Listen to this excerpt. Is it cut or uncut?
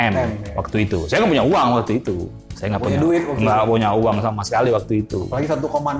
uncut